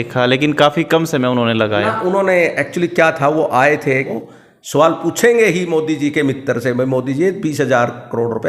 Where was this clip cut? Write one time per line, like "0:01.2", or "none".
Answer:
0:04.1